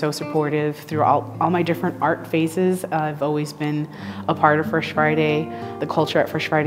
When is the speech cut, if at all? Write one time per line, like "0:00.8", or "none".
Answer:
0:05.7

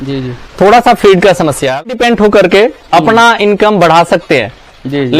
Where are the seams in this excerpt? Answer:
0:01.9

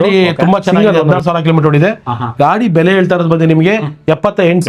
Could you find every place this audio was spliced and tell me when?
none

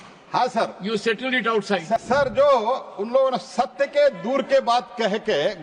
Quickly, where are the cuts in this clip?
0:02.0

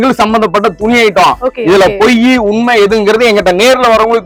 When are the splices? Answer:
none

